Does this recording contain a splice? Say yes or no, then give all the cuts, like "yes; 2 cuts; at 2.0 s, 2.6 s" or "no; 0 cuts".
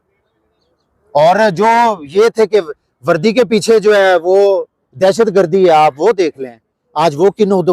no; 0 cuts